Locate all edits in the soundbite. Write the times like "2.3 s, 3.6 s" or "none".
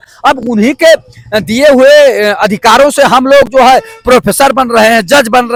none